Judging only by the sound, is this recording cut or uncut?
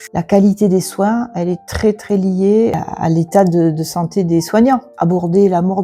cut